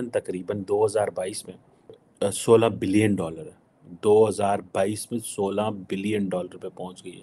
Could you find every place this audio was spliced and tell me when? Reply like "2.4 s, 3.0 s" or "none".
2.0 s